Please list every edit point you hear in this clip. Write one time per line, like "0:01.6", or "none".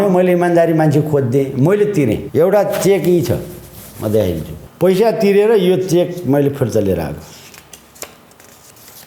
0:02.2
0:04.6